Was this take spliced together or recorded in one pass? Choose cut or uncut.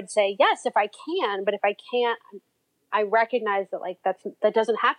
uncut